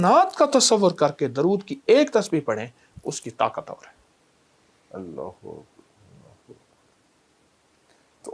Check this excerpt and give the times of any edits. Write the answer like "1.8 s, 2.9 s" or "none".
none